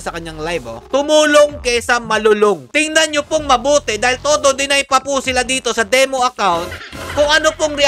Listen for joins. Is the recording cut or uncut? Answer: cut